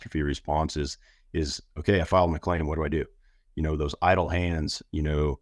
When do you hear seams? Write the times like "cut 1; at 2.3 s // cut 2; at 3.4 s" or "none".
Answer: none